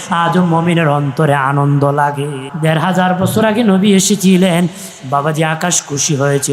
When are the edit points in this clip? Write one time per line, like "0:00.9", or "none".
0:02.5